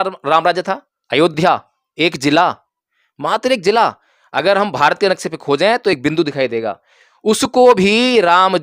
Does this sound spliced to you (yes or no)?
no